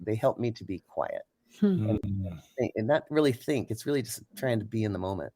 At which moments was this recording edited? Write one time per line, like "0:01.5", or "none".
none